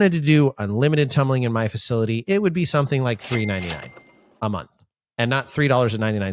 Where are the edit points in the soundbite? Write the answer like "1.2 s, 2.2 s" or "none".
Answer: none